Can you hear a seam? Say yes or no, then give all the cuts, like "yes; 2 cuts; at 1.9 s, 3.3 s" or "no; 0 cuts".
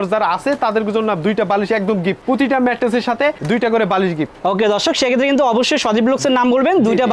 no; 0 cuts